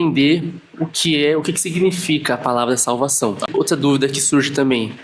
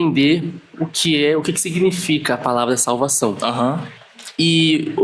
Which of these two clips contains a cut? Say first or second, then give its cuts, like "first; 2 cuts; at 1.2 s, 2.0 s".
first; 1 cut; at 3.5 s